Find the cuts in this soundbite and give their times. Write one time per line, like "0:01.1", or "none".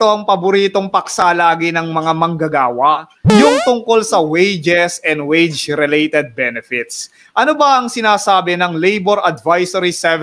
none